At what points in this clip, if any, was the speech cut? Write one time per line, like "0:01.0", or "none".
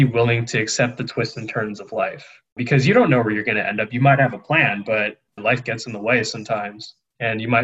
0:02.4
0:05.4